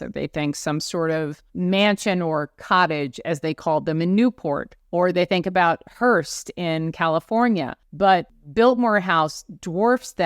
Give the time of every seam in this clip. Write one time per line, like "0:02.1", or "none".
0:01.4
0:04.7
0:08.1